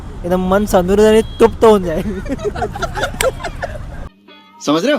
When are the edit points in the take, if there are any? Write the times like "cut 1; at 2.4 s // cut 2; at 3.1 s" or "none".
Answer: none

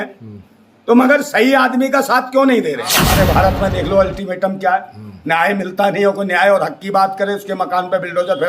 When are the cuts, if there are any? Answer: cut 1; at 3.0 s

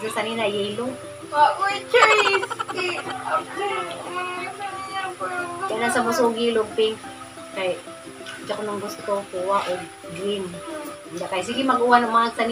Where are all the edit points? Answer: none

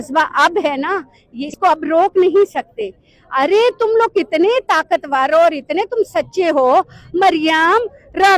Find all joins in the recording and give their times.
cut 1; at 1.5 s

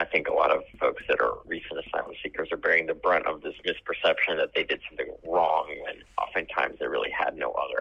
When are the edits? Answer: cut 1; at 1.4 s

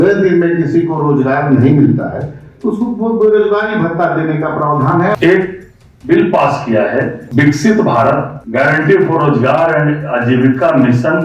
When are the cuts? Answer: cut 1; at 5.1 s // cut 2; at 7.2 s // cut 3; at 8.4 s

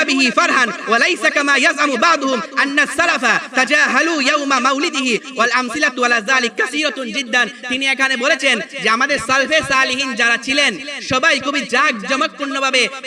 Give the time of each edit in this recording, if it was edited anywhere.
none

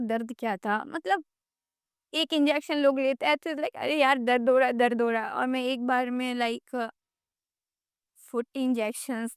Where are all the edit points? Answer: none

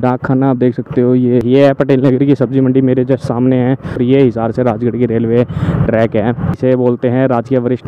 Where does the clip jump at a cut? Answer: cut 1; at 1.4 s // cut 2; at 4.0 s // cut 3; at 6.6 s

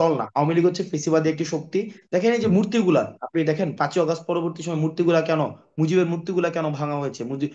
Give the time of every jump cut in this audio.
cut 1; at 2.0 s

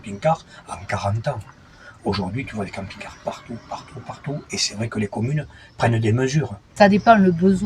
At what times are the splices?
cut 1; at 6.7 s

